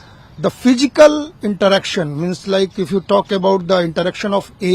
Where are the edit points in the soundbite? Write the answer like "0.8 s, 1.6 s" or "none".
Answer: none